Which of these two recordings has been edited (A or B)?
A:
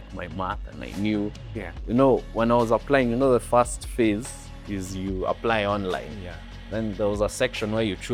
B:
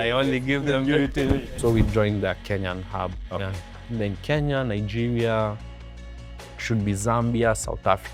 B